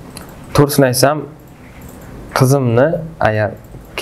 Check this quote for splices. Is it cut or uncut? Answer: uncut